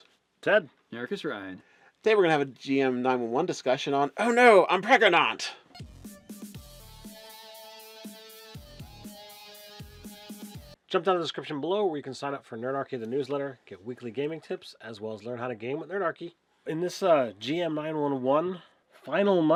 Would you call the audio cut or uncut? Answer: uncut